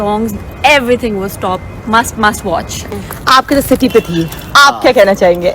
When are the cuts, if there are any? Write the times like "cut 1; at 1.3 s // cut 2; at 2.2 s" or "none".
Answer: cut 1; at 2.8 s